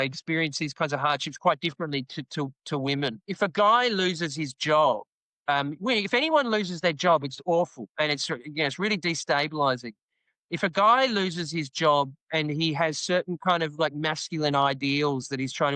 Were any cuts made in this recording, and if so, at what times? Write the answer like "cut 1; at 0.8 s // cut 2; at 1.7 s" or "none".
cut 1; at 3.3 s